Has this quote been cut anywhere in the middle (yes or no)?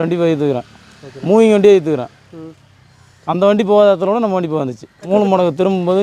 yes